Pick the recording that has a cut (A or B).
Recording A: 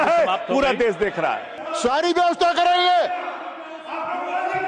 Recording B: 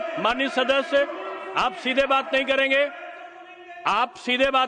A